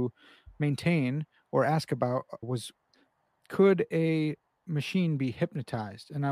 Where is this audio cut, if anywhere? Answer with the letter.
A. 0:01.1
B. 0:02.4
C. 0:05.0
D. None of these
B